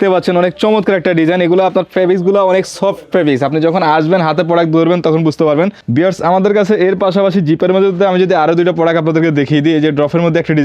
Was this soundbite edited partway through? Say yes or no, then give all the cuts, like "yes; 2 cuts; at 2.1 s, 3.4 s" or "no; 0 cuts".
yes; 1 cut; at 5.8 s